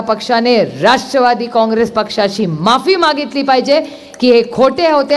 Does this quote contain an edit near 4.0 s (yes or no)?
no